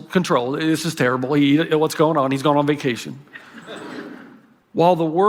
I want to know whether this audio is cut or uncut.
uncut